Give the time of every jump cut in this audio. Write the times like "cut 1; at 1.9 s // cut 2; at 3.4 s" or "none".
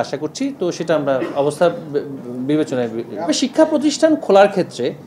cut 1; at 3.3 s